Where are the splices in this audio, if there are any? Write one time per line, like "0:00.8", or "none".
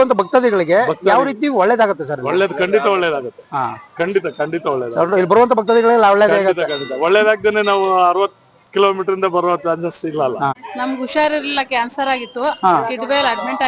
0:10.6

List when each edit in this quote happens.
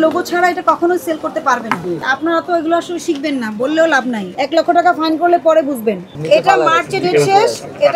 0:02.0
0:04.3
0:06.2

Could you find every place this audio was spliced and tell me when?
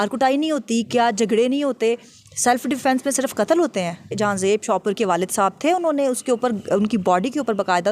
0:04.1

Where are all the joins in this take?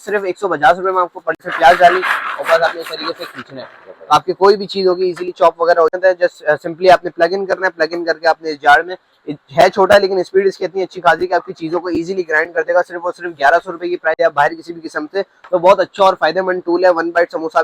0:01.4
0:06.0
0:14.2

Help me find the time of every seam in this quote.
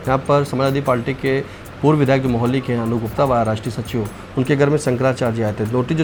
none

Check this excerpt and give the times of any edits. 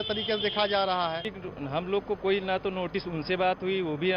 0:01.4

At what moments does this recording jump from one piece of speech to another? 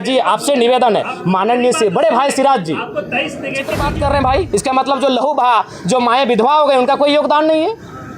0:03.8

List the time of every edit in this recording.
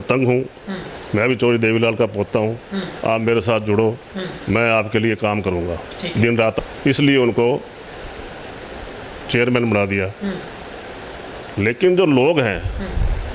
0:06.6

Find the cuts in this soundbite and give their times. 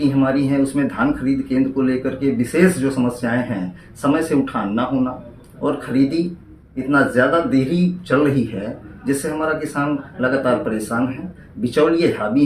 none

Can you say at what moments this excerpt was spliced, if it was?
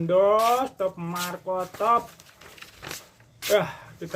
none

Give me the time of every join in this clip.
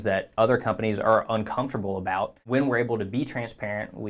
0:02.4

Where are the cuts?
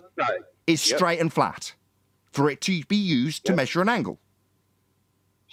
none

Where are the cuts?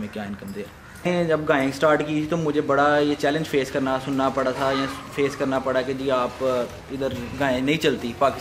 0:01.1

